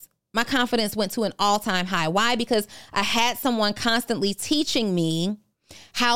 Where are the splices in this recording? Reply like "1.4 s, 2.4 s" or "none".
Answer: none